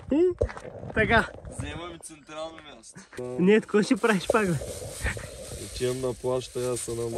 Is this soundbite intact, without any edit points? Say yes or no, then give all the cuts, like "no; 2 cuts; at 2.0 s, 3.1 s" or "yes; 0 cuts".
no; 1 cut; at 3.1 s